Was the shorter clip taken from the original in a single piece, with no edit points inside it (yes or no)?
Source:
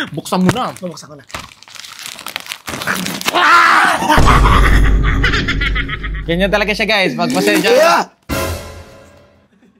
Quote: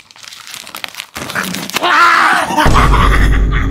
yes